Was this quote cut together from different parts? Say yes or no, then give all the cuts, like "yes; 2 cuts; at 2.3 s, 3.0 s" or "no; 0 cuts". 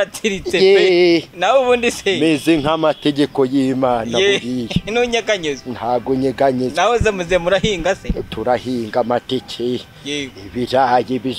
no; 0 cuts